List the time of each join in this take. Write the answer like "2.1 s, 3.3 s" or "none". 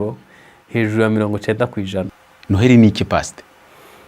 2.1 s